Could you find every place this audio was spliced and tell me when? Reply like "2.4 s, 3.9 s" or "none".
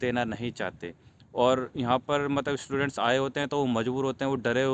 none